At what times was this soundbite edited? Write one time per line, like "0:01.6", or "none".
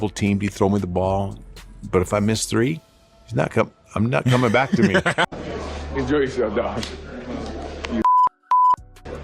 0:05.3